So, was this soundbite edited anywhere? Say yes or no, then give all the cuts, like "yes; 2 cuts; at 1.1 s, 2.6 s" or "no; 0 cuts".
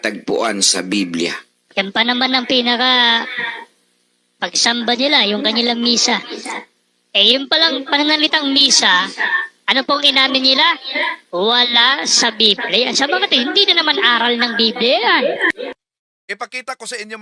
yes; 1 cut; at 15.9 s